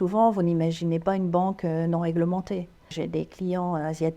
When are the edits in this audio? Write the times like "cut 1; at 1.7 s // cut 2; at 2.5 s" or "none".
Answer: cut 1; at 2.9 s